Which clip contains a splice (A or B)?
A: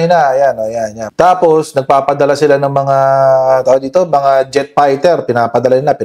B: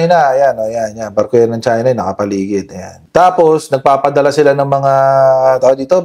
A